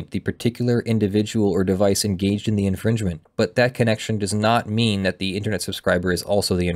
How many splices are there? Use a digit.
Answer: 1